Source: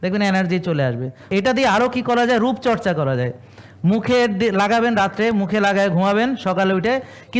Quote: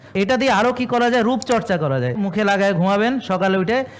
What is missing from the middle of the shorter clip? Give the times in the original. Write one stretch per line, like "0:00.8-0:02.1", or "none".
0:03.4-0:05.4